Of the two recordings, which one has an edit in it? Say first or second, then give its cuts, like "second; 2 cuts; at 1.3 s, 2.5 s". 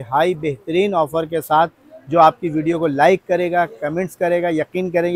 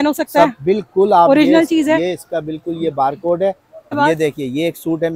second; 1 cut; at 3.9 s